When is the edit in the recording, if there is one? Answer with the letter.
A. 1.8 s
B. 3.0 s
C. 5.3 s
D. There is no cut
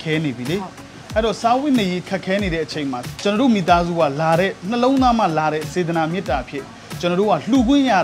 B